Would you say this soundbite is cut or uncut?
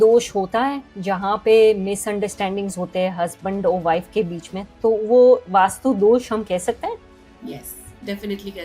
uncut